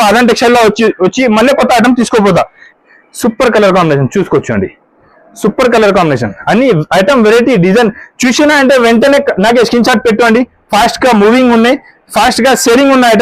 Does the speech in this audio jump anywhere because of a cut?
yes; 1 cut; at 2.6 s

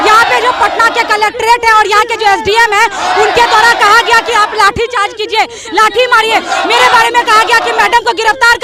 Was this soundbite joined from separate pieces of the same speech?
no; 0 cuts

